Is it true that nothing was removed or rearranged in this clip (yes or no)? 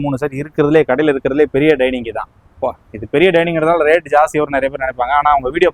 yes